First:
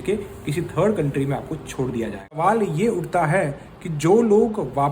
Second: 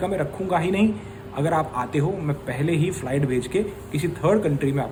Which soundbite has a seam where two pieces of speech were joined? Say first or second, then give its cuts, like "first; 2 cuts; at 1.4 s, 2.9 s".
first; 1 cut; at 2.4 s